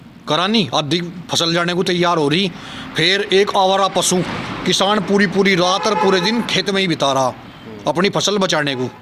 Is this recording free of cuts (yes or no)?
yes